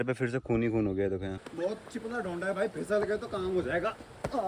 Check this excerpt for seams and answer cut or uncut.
cut